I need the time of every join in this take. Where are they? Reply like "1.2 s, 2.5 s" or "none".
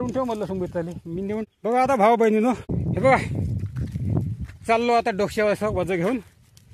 1.4 s, 2.7 s